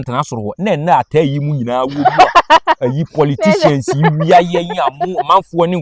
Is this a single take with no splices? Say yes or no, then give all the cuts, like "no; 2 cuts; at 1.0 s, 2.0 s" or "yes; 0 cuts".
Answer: yes; 0 cuts